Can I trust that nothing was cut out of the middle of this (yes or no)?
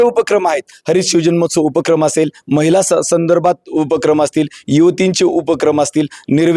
yes